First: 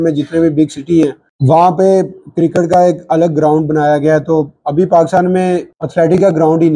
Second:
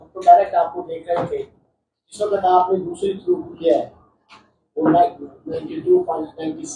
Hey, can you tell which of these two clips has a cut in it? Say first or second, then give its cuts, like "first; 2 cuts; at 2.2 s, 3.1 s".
first; 2 cuts; at 1.3 s, 5.8 s